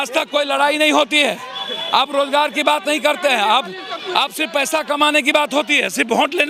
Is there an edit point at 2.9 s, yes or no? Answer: no